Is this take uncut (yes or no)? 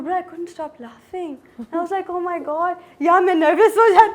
yes